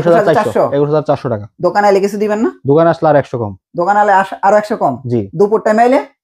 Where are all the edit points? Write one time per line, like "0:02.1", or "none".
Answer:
none